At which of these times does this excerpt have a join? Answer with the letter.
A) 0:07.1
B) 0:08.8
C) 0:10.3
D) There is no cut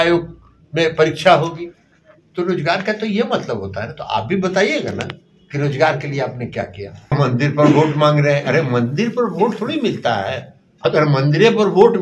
A